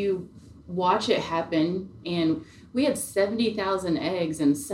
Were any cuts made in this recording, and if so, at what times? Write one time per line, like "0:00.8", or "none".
0:02.0

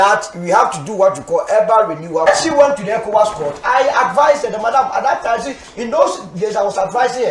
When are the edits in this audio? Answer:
0:02.3

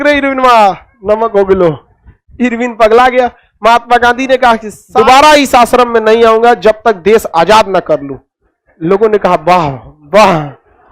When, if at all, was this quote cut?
0:04.8

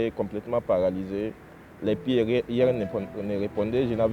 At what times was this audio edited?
none

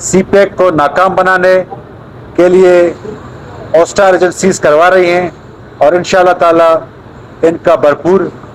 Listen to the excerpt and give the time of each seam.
none

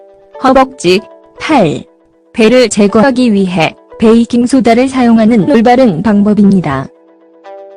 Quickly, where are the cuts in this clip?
0:01.0

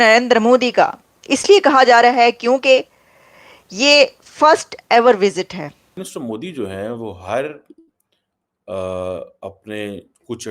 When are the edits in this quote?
0:06.1

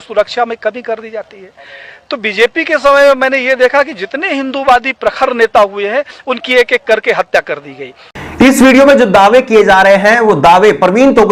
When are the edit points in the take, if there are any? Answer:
none

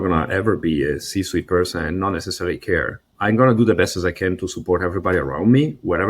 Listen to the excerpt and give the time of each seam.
0:03.0

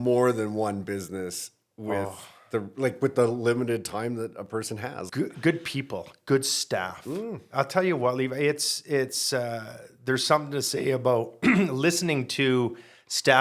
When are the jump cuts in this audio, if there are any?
0:05.1

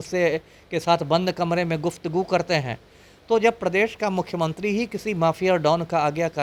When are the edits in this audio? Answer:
none

